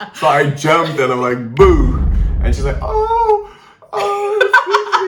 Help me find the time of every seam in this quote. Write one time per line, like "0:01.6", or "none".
none